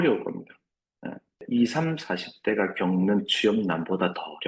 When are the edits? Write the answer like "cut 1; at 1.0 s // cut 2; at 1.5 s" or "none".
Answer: cut 1; at 1.4 s